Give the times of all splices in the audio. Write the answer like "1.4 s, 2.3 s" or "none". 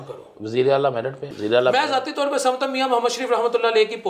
1.3 s